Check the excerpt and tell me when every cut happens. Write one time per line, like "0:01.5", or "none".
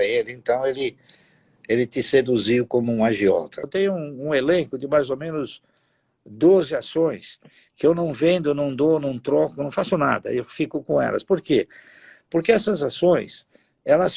0:03.7